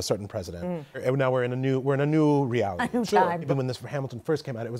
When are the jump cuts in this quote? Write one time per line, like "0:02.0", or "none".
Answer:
0:01.0
0:03.5